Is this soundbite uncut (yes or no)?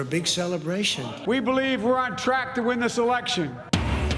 yes